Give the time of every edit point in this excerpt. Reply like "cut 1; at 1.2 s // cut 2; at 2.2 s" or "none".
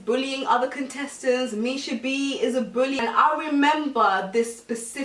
cut 1; at 3.0 s